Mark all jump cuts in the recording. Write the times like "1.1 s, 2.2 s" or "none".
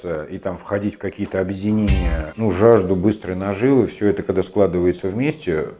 2.3 s